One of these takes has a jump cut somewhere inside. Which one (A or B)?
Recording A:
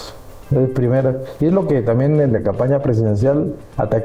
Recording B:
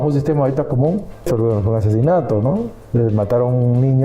B